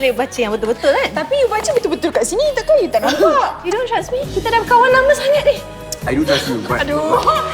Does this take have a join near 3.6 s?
yes; 1 cut; at 3.6 s

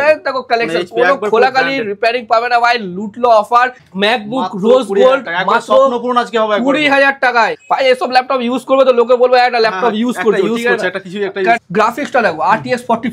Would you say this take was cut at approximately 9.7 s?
no; 3 cuts; at 3.8 s, 7.6 s, 11.6 s

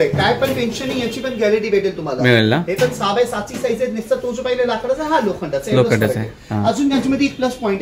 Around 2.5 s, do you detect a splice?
no; 0 cuts

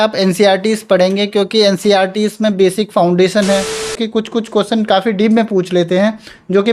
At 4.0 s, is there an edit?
yes; 1 cut; at 4.0 s

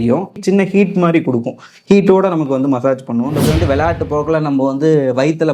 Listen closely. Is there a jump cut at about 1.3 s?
no; 1 cut; at 3.4 s

